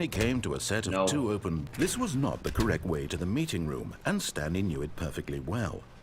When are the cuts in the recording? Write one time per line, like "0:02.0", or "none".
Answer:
0:01.7